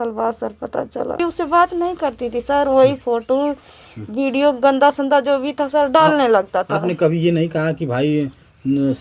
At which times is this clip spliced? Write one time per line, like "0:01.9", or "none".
0:01.2